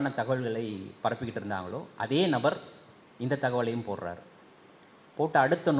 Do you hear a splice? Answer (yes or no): no